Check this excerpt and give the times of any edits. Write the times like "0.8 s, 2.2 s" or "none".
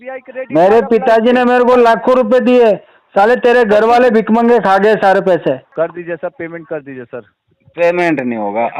5.7 s